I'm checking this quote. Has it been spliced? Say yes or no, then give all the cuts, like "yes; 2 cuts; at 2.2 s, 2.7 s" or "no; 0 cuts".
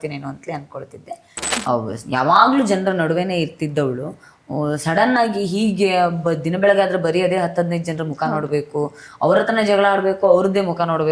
yes; 1 cut; at 1.5 s